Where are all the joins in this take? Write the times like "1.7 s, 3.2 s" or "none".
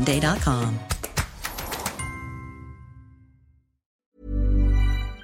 3.9 s